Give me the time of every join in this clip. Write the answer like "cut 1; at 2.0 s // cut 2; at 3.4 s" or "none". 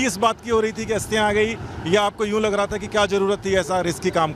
none